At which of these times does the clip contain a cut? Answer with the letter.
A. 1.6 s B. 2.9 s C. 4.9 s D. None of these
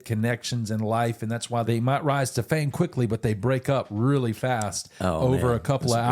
A